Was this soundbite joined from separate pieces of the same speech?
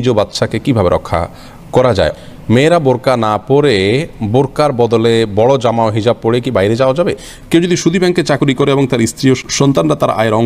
yes; 3 cuts; at 2.1 s, 7.2 s, 9.5 s

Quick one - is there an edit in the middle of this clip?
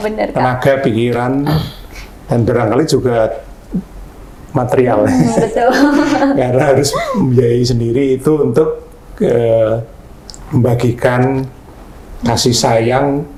no; 0 cuts

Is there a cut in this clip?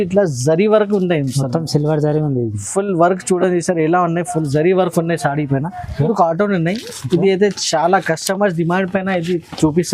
yes; 1 cut; at 6.0 s

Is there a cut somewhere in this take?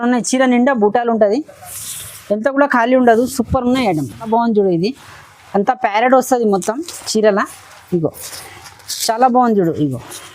yes; 1 cut; at 4.3 s

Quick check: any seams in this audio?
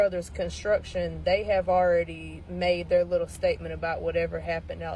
no; 0 cuts

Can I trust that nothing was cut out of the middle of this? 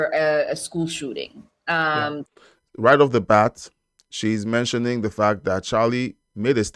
yes; 0 cuts

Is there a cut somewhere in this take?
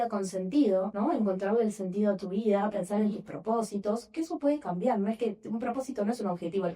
yes; 1 cut; at 0.9 s

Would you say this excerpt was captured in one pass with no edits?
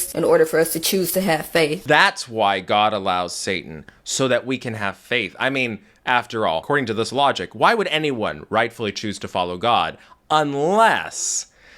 no; 2 cuts; at 1.8 s, 6.6 s

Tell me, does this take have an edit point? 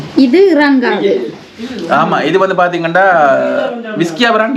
no; 0 cuts

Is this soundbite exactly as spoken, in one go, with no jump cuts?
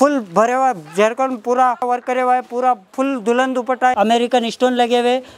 no; 2 cuts; at 1.8 s, 3.9 s

